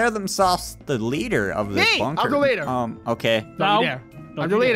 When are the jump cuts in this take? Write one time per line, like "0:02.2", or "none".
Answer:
none

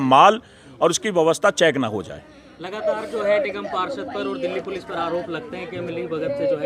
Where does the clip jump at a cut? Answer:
none

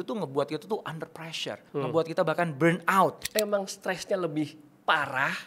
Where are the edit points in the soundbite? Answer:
0:01.6
0:03.2

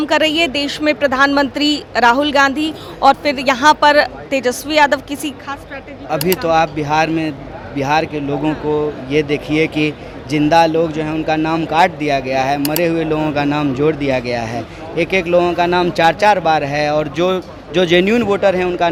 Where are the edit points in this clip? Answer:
none

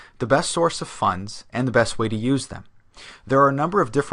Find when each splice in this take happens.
none

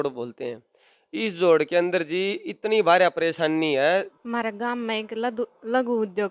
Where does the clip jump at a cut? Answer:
0:03.9

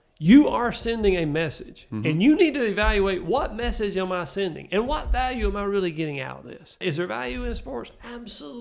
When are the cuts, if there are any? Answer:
0:06.8

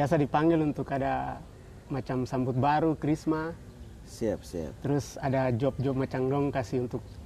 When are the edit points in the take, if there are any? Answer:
none

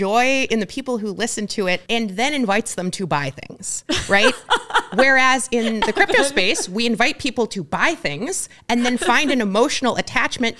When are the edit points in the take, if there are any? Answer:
0:01.8

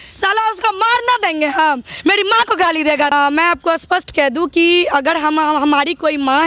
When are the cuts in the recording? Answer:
none

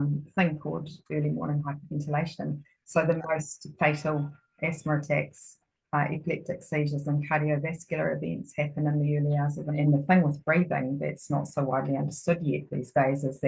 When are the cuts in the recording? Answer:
0:09.8

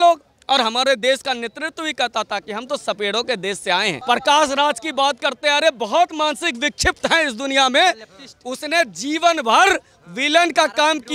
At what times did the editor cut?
0:04.0

